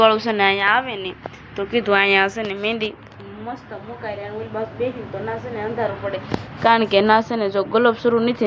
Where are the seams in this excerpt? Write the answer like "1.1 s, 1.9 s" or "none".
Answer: none